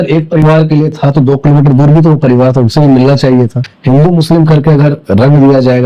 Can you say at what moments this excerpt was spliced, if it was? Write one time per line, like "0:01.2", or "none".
0:03.7